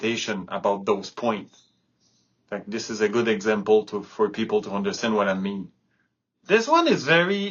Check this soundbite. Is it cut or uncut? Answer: cut